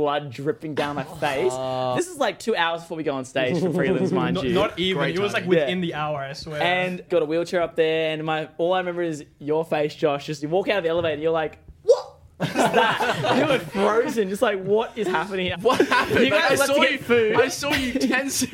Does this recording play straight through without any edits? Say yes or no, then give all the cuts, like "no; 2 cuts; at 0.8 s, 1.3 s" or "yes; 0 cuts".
no; 3 cuts; at 1.9 s, 7.1 s, 15.5 s